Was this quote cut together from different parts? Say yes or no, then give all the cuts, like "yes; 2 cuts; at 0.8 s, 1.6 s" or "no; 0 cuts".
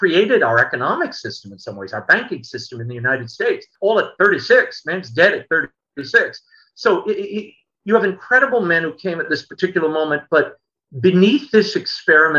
yes; 1 cut; at 3.7 s